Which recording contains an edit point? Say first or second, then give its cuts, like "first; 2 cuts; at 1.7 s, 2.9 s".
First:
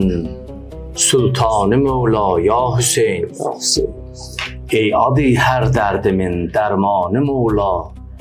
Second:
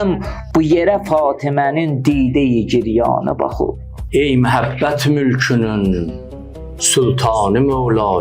second; 1 cut; at 4.0 s